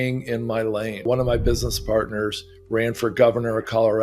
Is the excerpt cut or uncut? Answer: cut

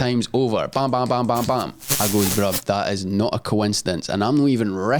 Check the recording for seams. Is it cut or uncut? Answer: cut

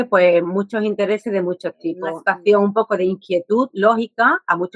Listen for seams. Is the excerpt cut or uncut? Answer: cut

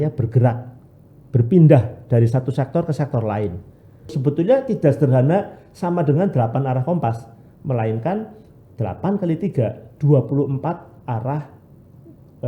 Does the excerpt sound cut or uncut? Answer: cut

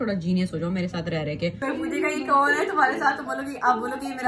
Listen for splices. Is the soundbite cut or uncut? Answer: cut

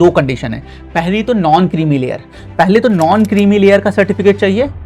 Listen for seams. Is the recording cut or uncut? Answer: uncut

